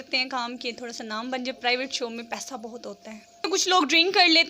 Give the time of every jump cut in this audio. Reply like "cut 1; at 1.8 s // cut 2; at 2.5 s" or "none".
cut 1; at 3.4 s